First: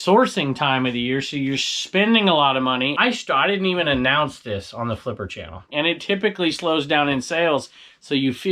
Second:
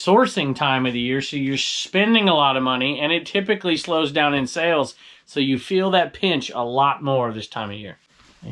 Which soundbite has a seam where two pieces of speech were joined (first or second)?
first